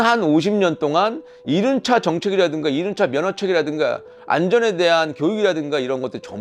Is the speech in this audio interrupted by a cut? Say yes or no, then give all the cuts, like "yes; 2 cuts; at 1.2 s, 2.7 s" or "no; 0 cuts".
no; 0 cuts